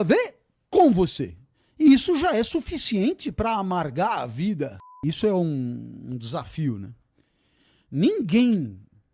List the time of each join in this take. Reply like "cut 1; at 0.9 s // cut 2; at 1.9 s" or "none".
cut 1; at 4.9 s